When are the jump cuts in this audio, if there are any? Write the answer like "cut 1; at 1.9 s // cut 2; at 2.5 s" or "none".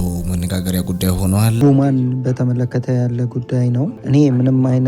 cut 1; at 1.6 s // cut 2; at 4.0 s